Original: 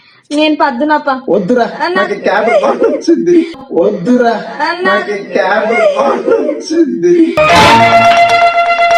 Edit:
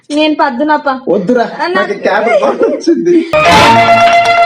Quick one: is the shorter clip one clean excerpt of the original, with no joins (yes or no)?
no